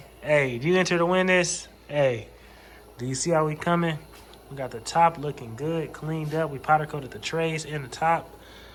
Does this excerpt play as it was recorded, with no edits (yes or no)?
yes